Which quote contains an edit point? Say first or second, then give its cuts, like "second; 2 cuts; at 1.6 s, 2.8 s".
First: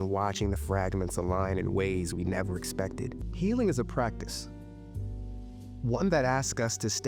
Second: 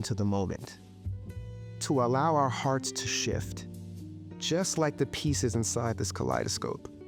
first; 1 cut; at 3.2 s